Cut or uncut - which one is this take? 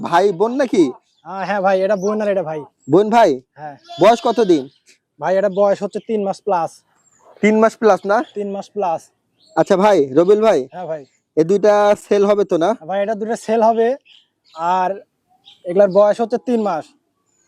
uncut